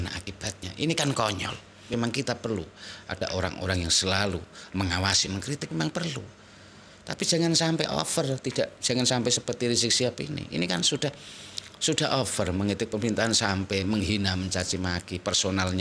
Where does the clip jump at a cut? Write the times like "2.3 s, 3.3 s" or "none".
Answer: 1.9 s